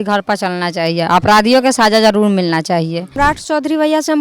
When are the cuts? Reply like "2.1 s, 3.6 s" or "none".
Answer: 3.1 s